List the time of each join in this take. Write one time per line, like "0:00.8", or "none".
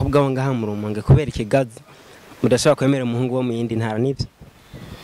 none